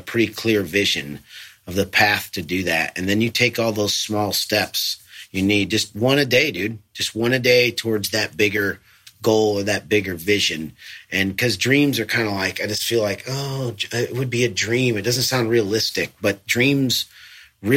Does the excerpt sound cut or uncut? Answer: uncut